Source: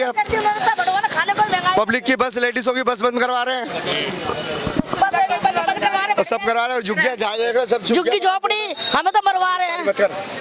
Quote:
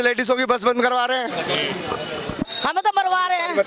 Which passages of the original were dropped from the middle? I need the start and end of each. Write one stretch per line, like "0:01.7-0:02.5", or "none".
0:04.8-0:08.7